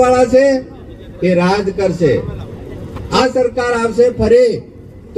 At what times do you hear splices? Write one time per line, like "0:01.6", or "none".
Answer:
0:03.2